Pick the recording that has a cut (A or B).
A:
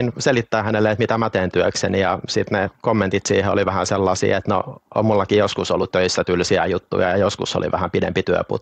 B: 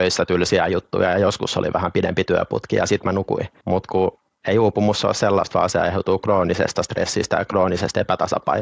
B